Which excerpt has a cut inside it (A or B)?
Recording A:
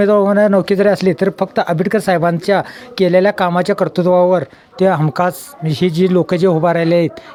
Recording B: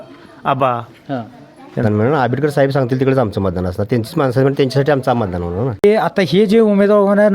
B